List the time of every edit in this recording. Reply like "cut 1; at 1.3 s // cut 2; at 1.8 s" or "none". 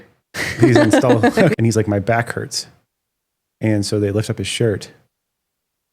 cut 1; at 1.5 s